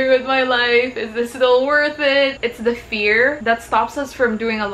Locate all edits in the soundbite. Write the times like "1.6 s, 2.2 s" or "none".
2.4 s